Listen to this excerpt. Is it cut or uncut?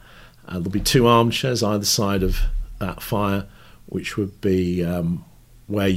uncut